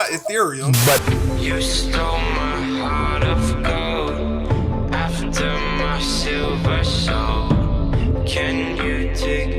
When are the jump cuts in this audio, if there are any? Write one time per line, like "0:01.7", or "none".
0:01.0